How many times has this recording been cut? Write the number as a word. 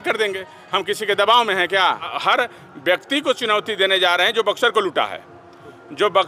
one